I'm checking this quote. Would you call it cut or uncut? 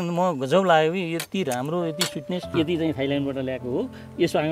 cut